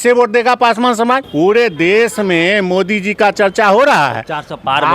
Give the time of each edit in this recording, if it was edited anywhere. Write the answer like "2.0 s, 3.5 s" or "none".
1.3 s